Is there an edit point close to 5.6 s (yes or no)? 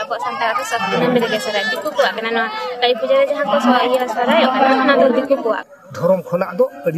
yes